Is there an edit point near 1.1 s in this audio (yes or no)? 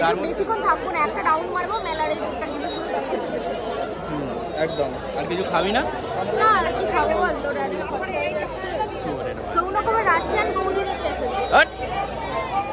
no